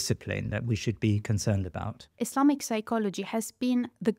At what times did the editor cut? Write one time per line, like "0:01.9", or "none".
0:02.1